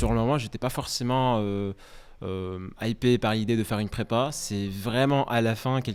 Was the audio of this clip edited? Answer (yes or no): no